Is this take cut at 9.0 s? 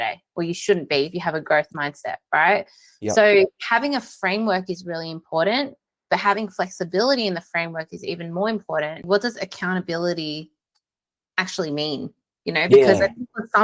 yes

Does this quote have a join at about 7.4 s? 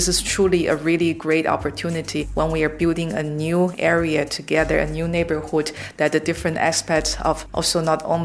yes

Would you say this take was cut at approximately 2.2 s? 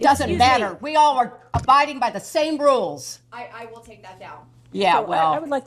no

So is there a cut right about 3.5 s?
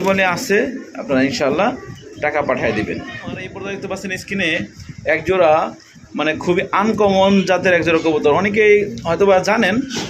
yes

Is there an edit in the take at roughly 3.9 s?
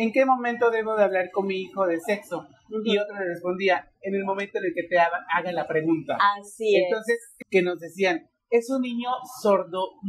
no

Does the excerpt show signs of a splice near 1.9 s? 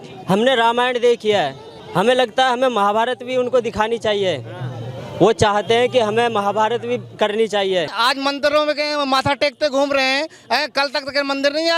no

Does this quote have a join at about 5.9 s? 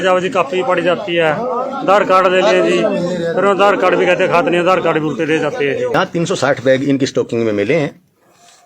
yes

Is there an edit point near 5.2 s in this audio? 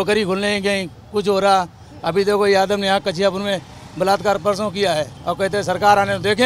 yes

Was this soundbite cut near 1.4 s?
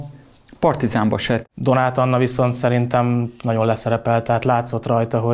yes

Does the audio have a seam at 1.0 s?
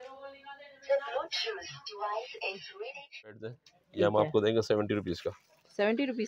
no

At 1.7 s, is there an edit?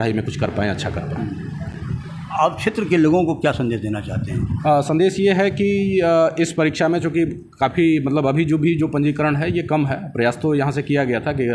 no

